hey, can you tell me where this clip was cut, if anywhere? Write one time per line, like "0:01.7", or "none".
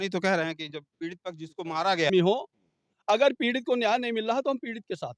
0:02.1